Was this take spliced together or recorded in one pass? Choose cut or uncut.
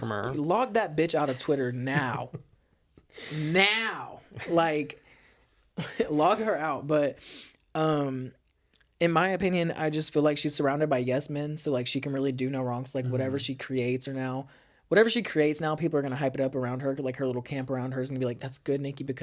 uncut